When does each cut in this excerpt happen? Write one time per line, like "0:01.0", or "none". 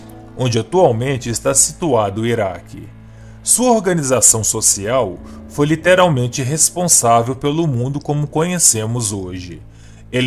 none